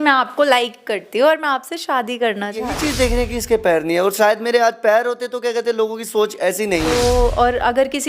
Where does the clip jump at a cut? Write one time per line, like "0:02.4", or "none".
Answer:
0:02.7
0:06.9